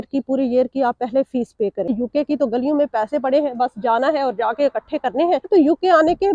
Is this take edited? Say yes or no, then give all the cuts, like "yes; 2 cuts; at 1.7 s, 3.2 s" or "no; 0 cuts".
yes; 2 cuts; at 1.9 s, 5.5 s